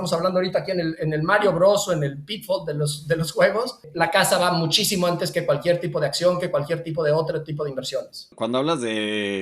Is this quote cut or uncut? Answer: cut